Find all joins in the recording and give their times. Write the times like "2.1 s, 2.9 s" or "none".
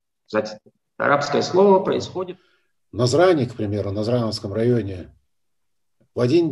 2.1 s